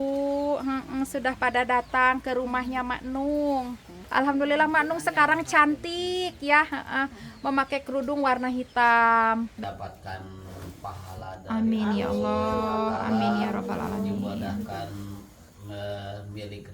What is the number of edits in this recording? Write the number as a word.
two